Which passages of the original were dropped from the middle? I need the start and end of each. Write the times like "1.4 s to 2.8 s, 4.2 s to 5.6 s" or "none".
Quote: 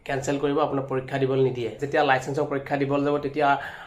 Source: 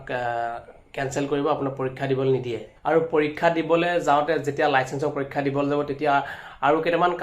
2.7 s to 4.5 s